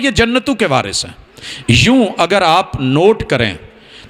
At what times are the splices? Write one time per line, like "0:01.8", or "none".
none